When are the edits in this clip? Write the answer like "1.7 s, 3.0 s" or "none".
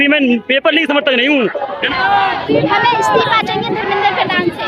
1.8 s